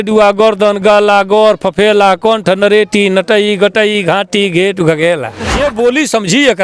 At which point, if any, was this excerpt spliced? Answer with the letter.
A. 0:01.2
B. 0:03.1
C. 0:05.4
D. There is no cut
C